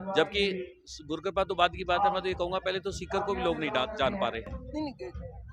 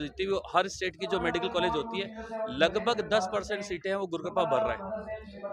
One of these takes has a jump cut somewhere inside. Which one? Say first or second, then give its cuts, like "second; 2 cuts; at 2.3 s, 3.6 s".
first; 1 cut; at 4.5 s